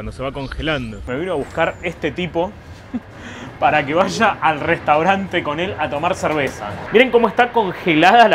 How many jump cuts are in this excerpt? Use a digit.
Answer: 2